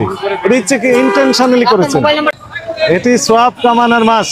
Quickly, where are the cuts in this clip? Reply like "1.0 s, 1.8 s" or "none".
2.4 s